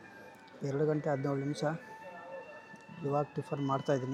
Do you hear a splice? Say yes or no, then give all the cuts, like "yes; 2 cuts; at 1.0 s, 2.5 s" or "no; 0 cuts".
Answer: no; 0 cuts